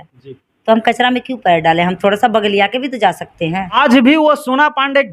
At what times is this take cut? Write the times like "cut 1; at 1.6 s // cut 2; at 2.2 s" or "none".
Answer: cut 1; at 3.7 s